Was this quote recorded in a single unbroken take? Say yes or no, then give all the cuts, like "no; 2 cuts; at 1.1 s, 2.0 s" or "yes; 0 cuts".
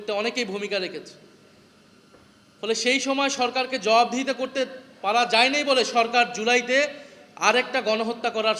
yes; 0 cuts